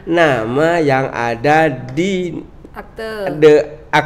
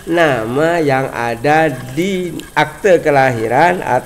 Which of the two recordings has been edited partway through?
second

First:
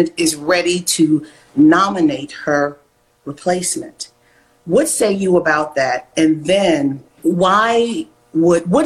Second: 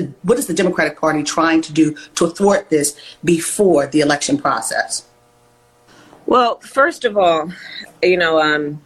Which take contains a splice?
first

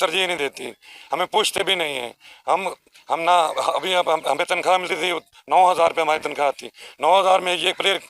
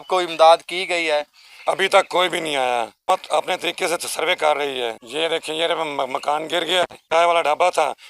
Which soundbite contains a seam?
second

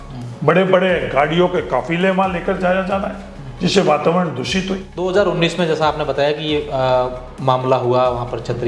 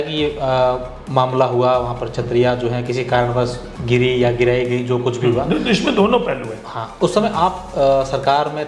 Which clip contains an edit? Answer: first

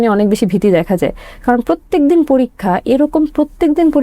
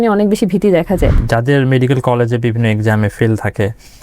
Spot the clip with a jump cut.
second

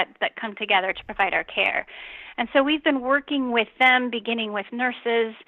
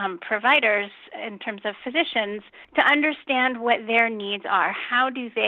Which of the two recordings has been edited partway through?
second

